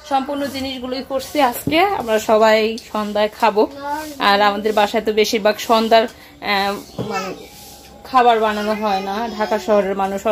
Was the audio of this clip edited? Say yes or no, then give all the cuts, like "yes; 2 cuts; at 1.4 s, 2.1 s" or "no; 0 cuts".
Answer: no; 0 cuts